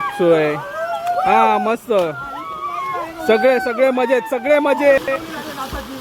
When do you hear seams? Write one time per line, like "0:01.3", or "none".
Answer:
0:05.0